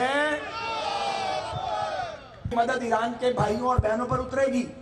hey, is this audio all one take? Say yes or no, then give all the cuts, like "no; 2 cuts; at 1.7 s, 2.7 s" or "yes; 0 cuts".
no; 1 cut; at 2.5 s